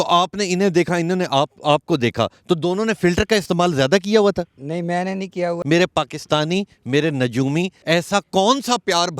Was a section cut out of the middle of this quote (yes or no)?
yes